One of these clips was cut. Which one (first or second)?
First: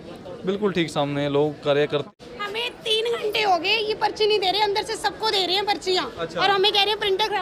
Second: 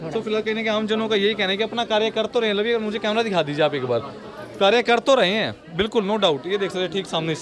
first